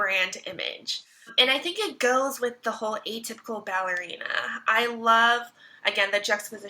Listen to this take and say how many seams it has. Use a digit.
1